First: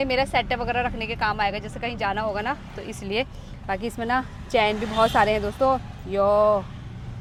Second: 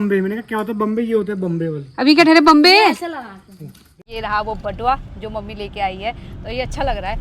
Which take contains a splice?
second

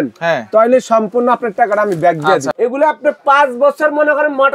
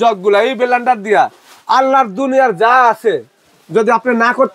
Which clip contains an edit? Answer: first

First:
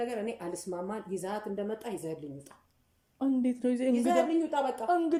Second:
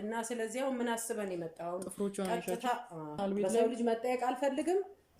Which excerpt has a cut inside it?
second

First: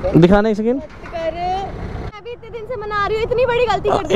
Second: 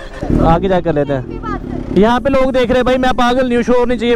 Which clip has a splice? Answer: first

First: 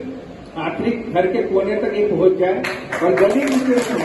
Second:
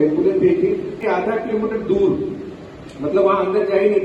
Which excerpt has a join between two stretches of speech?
second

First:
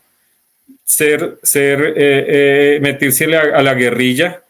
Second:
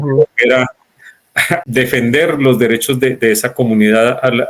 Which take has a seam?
second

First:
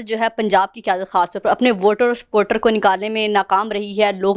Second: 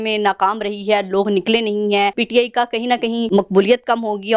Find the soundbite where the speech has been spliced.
second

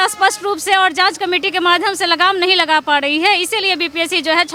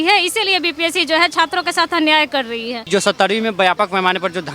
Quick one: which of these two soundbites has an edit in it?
second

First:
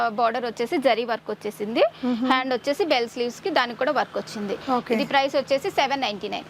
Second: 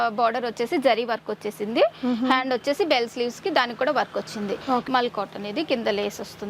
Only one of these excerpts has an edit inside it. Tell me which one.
second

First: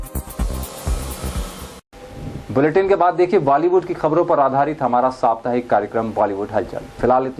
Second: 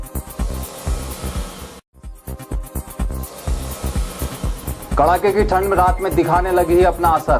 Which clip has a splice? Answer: second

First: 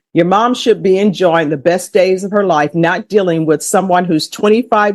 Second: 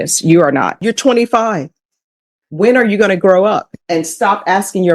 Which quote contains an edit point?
second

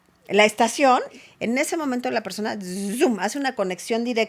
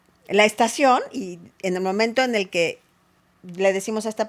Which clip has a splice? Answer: first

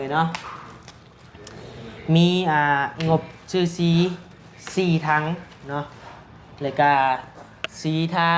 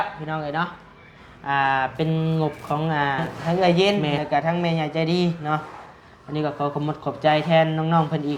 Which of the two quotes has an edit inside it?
second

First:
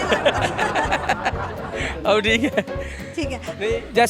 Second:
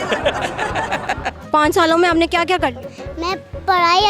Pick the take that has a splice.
second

